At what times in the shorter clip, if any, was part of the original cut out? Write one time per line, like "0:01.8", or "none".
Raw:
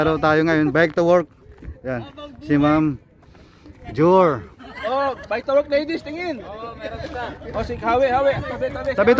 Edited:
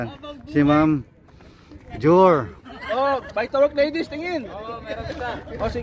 none